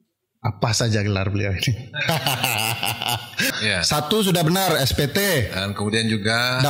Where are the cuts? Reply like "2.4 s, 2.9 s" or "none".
3.5 s